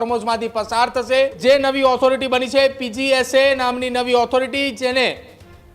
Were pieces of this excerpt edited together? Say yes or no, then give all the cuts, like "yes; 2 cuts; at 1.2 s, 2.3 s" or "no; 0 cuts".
yes; 1 cut; at 1.4 s